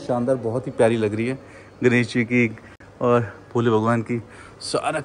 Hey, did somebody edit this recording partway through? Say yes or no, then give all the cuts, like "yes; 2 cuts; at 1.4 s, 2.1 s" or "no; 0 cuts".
no; 0 cuts